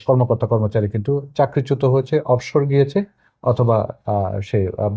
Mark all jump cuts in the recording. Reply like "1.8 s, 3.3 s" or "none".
none